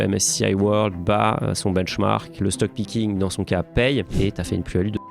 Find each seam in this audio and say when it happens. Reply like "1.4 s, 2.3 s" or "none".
4.1 s